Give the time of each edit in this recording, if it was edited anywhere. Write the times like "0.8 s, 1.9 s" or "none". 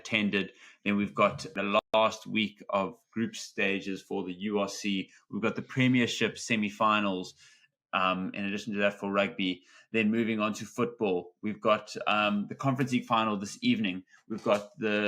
1.9 s